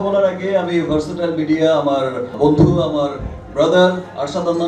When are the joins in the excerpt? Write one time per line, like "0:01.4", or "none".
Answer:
0:02.3